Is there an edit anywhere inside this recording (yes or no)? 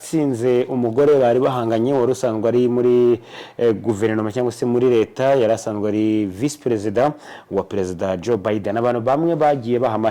no